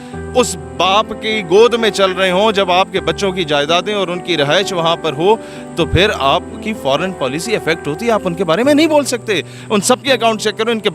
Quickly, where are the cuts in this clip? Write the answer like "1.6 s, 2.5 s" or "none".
9.6 s